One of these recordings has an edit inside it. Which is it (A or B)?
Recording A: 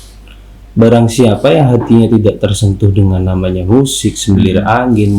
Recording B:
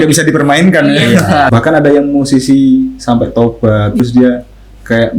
B